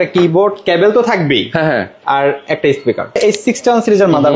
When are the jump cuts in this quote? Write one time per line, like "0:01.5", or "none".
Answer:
0:03.2